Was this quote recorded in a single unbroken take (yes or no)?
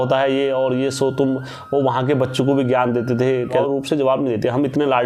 no